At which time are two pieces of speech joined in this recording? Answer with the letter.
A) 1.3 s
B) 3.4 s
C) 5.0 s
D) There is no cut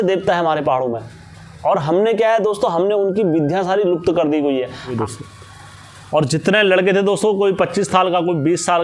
C